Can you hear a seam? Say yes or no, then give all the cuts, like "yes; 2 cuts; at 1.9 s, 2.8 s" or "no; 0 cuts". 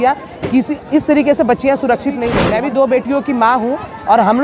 yes; 1 cut; at 2.3 s